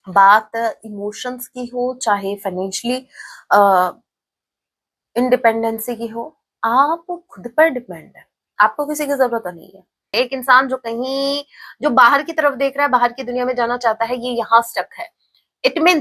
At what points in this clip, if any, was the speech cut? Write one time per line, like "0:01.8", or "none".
0:10.1